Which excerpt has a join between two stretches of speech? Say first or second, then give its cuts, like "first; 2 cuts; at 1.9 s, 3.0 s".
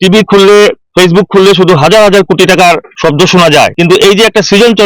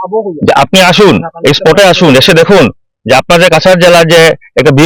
first; 3 cuts; at 0.8 s, 2.9 s, 3.7 s